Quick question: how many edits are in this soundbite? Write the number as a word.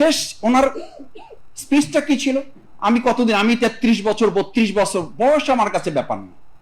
one